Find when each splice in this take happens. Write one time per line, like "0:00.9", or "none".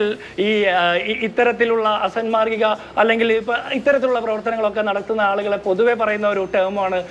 none